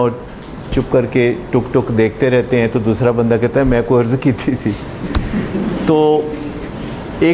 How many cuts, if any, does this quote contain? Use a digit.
0